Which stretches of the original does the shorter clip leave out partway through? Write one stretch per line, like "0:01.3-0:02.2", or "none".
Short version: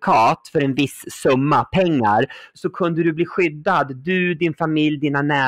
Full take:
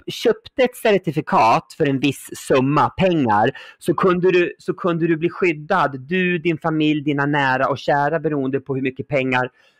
0:03.8-0:04.6